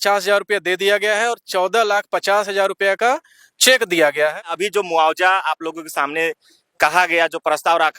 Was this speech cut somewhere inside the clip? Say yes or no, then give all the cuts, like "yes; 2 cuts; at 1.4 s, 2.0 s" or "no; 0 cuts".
yes; 1 cut; at 4.4 s